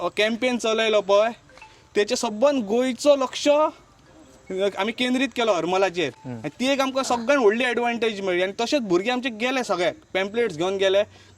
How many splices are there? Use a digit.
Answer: 0